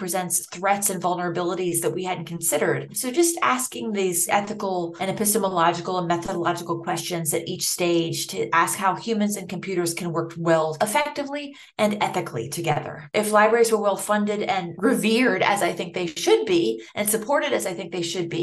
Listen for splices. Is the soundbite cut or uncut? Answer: cut